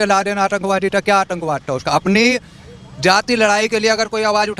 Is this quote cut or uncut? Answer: uncut